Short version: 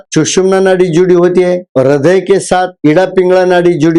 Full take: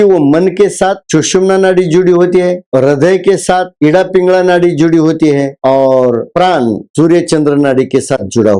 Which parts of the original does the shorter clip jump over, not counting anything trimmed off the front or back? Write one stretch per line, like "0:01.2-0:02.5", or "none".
none